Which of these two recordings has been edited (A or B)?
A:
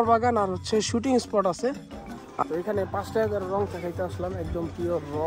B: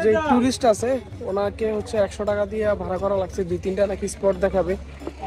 A